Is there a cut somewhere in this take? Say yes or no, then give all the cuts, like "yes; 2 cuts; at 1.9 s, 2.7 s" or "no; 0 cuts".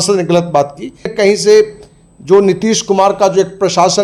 yes; 1 cut; at 1.1 s